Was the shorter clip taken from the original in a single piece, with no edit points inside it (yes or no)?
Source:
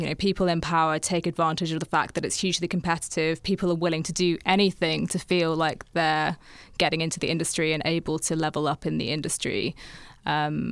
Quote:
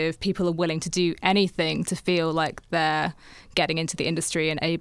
yes